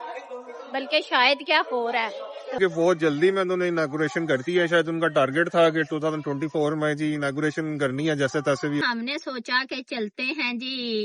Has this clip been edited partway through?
yes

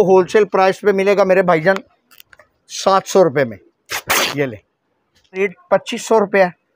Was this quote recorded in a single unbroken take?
no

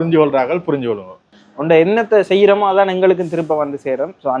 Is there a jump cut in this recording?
yes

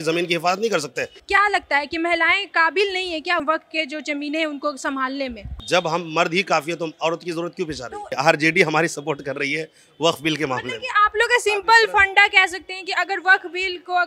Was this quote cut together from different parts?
yes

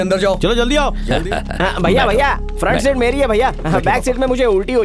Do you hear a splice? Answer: yes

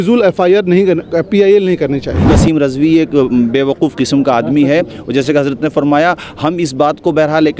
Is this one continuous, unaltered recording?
no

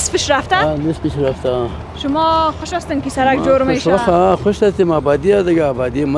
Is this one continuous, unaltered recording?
yes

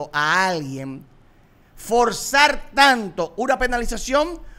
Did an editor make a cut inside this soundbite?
no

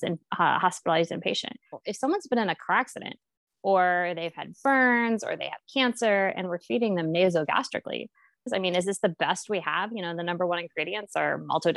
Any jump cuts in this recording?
yes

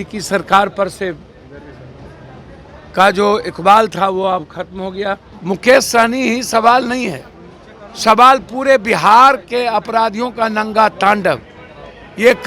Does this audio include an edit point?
yes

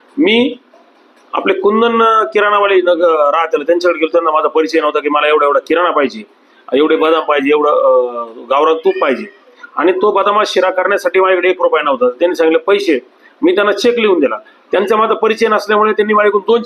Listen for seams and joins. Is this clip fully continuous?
yes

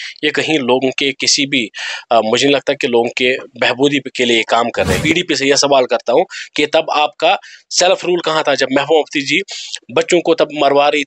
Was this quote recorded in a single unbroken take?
no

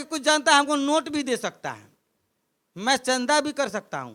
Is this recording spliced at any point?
no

